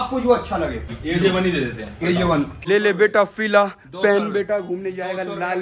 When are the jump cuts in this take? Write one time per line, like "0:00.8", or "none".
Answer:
0:01.0
0:02.5